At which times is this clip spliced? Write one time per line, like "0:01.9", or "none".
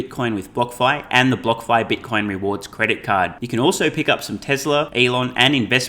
0:04.9